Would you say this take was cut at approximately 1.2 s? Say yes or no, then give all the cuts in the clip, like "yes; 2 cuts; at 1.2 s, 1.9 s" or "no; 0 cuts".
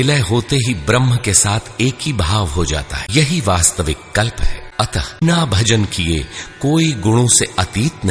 no; 2 cuts; at 3.0 s, 5.2 s